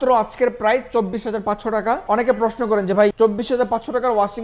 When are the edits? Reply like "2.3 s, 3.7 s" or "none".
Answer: 2.0 s, 3.1 s